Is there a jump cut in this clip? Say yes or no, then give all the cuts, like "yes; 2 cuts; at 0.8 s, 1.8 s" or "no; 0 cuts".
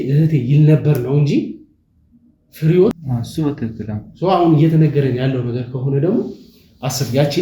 no; 0 cuts